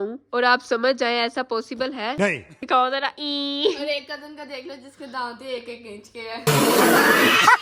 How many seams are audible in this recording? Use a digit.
1